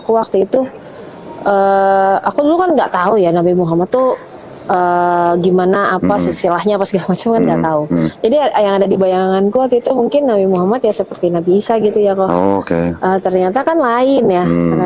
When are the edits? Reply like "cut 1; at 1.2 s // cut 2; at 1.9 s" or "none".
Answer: none